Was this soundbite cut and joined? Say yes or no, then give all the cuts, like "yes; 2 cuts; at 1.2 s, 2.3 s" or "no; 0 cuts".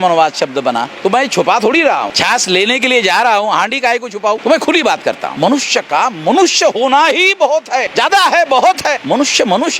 yes; 5 cuts; at 2.1 s, 4.4 s, 5.3 s, 7.9 s, 9.0 s